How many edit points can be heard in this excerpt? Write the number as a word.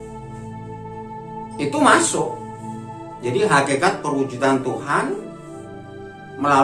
zero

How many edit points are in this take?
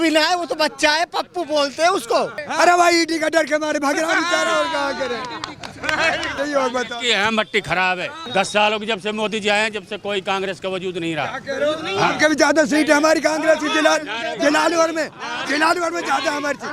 three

